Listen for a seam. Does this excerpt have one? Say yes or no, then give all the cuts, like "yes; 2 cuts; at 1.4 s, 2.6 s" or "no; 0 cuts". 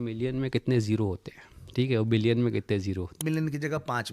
yes; 1 cut; at 3.2 s